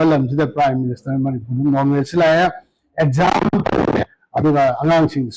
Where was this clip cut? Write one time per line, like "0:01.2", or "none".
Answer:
none